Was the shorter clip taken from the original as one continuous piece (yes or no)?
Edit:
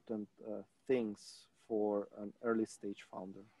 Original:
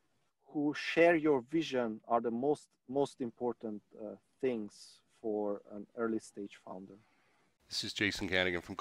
yes